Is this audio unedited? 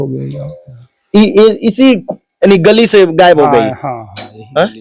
yes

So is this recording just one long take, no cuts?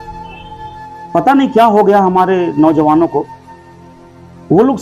yes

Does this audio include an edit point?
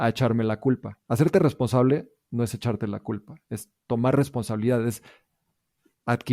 no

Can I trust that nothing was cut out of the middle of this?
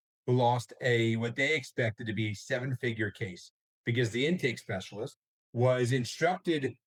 yes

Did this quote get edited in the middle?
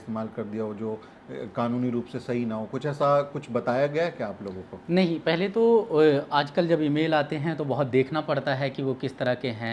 no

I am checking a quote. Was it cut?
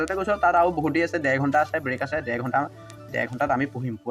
no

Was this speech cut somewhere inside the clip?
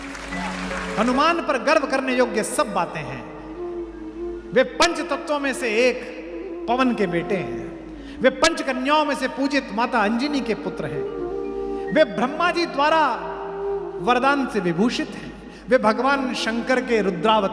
yes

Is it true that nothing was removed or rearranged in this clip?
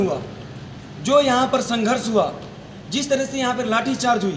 yes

